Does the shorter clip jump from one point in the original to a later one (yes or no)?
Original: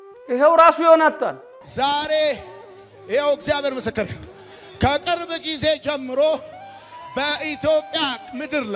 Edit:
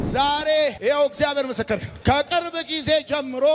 yes